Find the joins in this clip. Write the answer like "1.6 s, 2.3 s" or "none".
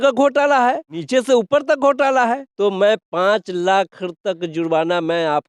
1.0 s, 2.5 s